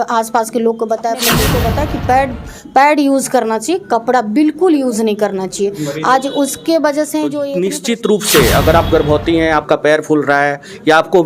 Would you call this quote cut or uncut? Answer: cut